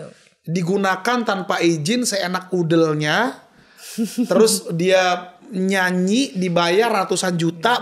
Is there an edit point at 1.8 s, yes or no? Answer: no